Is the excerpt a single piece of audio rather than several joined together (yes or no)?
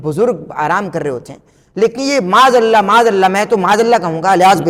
yes